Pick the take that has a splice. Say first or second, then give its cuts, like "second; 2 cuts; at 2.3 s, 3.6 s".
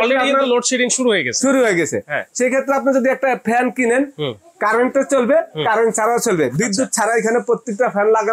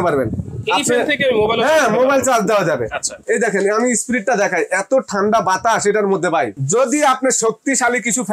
second; 2 cuts; at 3.1 s, 6.6 s